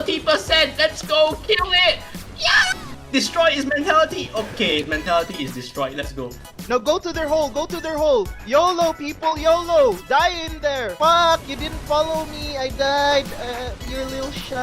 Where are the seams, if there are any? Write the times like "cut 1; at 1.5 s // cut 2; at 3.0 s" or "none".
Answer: cut 1; at 2.8 s // cut 2; at 6.5 s // cut 3; at 10.9 s